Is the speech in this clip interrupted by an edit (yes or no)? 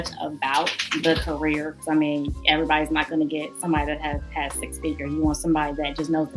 no